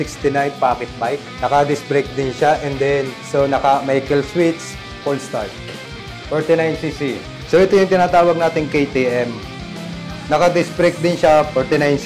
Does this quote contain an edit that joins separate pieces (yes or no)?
yes